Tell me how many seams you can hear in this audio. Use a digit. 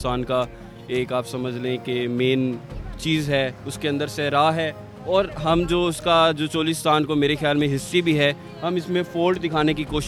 0